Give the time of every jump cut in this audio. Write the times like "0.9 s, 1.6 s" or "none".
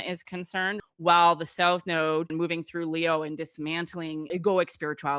0.8 s, 2.3 s, 4.3 s